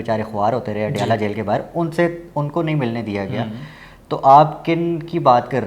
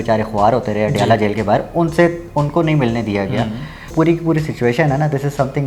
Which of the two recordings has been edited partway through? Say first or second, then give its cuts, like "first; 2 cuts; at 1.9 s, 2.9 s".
second; 1 cut; at 3.9 s